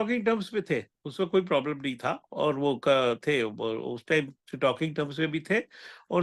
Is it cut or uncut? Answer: uncut